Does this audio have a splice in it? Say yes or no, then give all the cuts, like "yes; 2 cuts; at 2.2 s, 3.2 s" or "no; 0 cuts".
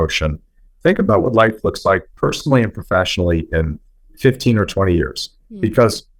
no; 0 cuts